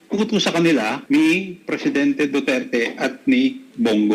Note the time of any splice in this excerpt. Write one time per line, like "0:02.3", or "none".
0:01.0

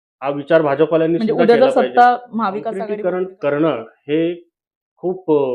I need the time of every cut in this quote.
0:02.7

